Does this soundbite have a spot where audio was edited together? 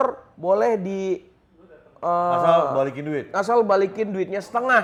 no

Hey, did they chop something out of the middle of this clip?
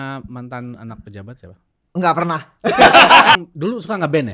yes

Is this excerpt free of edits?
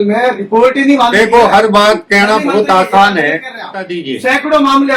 no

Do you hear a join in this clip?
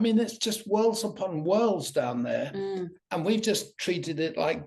no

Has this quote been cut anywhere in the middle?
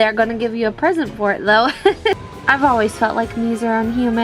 yes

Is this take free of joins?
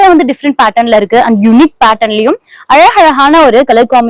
yes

